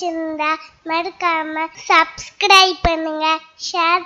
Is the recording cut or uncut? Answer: cut